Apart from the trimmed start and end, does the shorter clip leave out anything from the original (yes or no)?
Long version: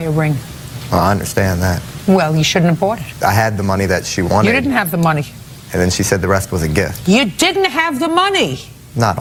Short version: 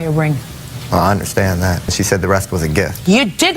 yes